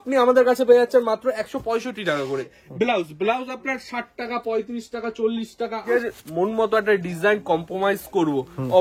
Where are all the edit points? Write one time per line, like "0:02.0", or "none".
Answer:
0:02.6
0:06.0